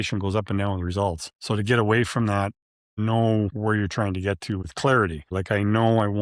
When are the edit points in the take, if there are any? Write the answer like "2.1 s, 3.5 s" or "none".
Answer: 5.3 s